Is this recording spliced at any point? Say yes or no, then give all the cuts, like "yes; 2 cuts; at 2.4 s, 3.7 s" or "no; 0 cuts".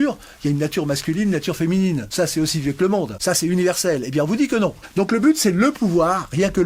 yes; 3 cuts; at 2.1 s, 3.1 s, 4.8 s